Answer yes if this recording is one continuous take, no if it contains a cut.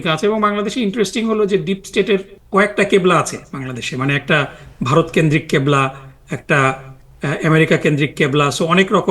no